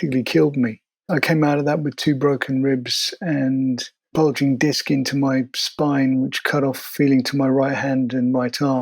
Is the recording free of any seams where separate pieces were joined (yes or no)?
no